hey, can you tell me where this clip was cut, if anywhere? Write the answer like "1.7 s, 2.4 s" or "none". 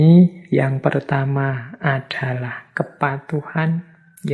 none

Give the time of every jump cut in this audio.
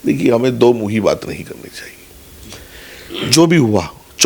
none

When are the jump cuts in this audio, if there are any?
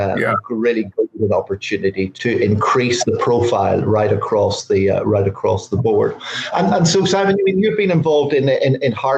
2.1 s

